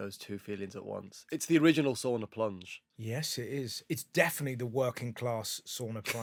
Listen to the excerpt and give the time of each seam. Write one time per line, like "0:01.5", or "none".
none